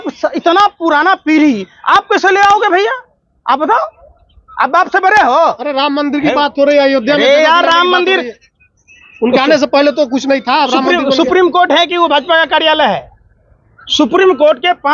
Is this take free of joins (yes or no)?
yes